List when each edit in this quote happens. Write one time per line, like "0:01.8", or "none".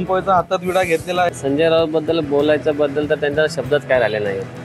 0:01.3